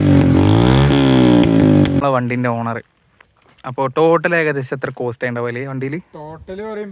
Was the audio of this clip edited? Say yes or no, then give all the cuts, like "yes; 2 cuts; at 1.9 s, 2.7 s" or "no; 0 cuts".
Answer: yes; 1 cut; at 2.0 s